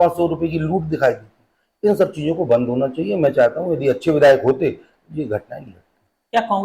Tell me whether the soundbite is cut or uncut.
uncut